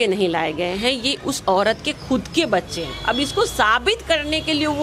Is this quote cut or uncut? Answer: uncut